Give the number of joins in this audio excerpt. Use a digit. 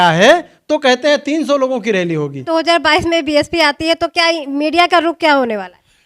1